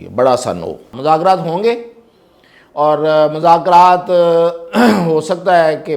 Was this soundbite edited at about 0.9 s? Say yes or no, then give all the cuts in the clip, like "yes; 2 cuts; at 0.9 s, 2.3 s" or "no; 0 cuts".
yes; 1 cut; at 0.9 s